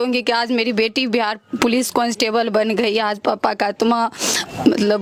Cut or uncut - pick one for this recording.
uncut